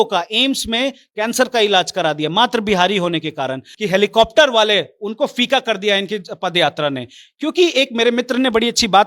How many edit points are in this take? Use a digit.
1